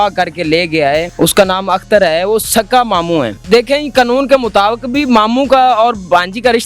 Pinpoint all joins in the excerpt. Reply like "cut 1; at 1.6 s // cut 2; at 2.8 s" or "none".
cut 1; at 1.1 s // cut 2; at 3.4 s